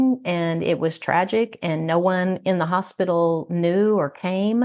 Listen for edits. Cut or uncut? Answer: uncut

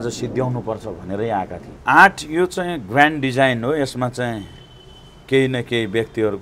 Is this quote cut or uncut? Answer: cut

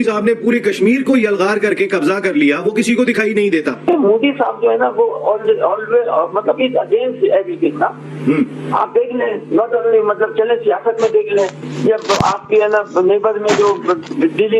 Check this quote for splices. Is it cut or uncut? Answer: cut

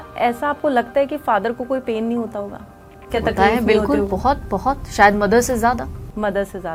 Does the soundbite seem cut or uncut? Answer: uncut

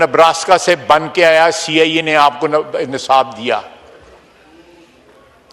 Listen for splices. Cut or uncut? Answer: uncut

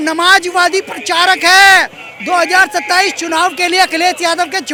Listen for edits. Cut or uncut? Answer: uncut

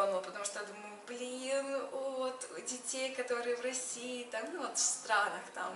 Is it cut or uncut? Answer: uncut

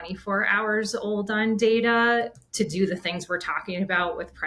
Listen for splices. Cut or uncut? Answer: uncut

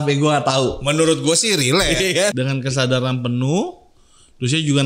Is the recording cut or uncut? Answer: cut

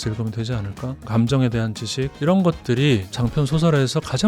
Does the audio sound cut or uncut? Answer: cut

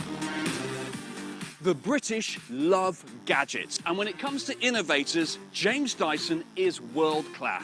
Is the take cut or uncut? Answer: uncut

